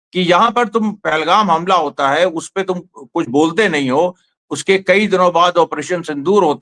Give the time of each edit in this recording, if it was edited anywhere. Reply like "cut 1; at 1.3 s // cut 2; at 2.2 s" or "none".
none

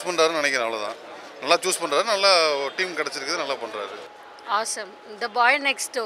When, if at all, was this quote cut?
cut 1; at 4.1 s

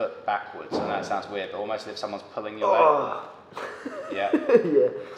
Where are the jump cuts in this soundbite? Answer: none

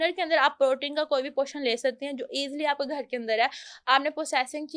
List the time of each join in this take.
none

